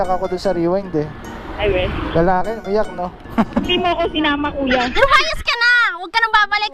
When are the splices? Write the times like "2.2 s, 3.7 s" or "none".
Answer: 4.9 s